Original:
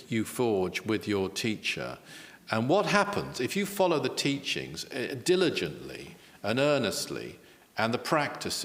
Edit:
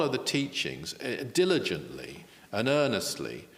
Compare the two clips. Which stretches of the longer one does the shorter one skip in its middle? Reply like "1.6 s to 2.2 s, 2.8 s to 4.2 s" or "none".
none